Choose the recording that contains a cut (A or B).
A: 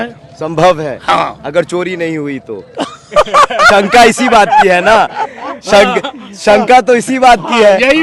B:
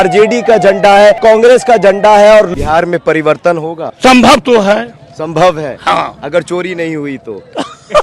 B